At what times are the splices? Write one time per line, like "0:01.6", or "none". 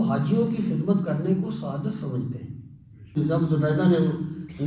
0:03.1

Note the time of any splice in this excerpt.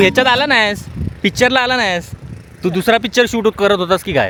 none

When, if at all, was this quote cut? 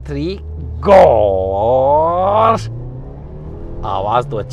none

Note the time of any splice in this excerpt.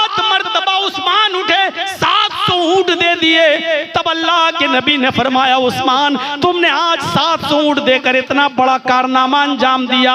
none

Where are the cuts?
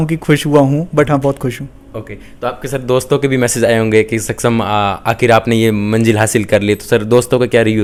none

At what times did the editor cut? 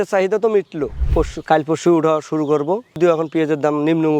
0:01.0
0:03.0

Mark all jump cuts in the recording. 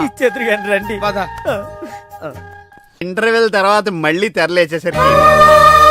0:03.0

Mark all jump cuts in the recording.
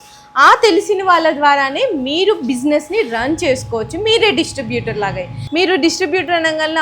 none

